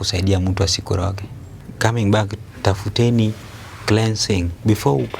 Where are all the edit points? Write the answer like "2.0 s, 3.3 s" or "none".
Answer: 1.6 s